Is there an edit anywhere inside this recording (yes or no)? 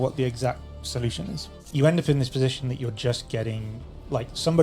yes